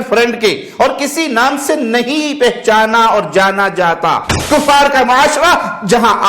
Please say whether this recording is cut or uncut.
cut